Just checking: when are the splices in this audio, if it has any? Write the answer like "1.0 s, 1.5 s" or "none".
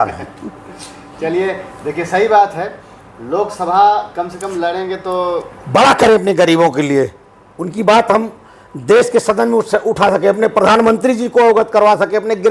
none